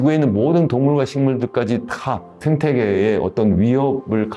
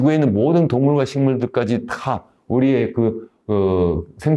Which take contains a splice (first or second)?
first